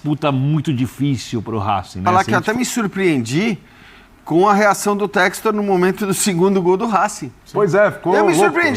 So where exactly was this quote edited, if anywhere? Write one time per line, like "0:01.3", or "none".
0:02.1